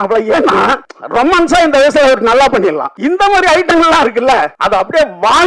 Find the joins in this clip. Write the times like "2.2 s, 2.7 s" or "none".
0.9 s, 2.9 s, 4.6 s